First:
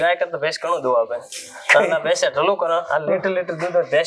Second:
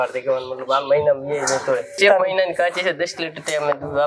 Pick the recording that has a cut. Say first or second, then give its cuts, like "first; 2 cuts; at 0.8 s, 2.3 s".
second; 1 cut; at 1.9 s